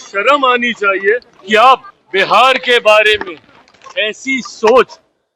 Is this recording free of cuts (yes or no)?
no